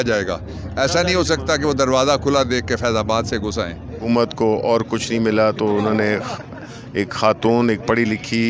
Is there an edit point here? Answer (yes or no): yes